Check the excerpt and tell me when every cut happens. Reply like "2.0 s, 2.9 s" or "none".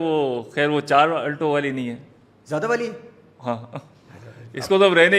none